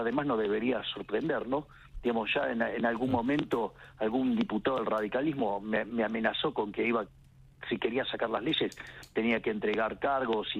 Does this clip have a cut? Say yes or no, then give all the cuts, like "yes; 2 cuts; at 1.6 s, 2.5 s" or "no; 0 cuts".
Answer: no; 0 cuts